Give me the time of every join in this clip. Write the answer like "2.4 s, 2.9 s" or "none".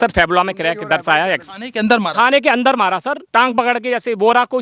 1.4 s, 3.2 s